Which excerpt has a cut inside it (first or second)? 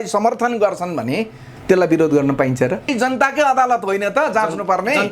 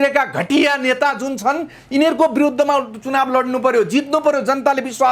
first